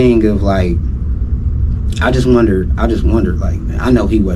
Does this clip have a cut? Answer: no; 0 cuts

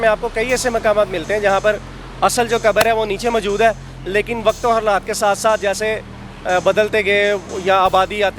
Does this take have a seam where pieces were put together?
no; 0 cuts

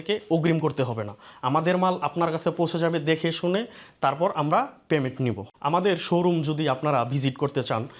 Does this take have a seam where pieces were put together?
no; 0 cuts

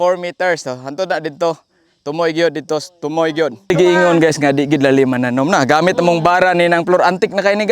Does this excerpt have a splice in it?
yes; 1 cut; at 3.7 s

